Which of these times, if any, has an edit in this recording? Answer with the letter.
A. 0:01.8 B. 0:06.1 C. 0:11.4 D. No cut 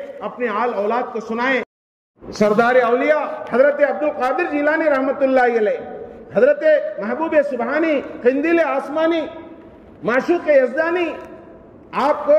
A